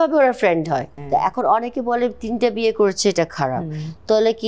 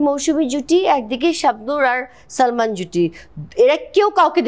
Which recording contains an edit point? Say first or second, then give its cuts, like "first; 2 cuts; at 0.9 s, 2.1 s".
first; 1 cut; at 0.9 s